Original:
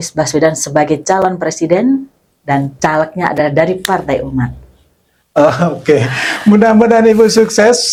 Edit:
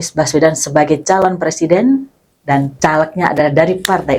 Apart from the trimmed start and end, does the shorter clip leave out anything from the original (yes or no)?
no